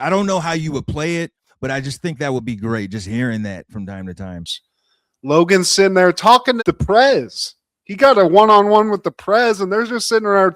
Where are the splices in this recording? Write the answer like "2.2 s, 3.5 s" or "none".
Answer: 4.6 s